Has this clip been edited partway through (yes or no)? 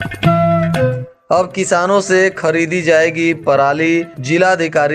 yes